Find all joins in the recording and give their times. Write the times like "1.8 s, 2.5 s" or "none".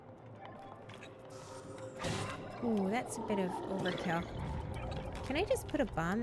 0.9 s